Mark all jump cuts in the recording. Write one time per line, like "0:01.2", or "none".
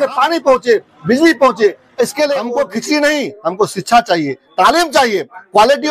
0:02.5